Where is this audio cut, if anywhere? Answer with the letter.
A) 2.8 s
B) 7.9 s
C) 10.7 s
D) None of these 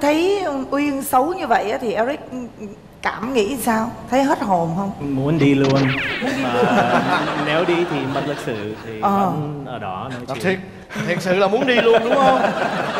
D